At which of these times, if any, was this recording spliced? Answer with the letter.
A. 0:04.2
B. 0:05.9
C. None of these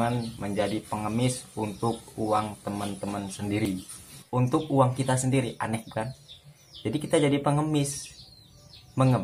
A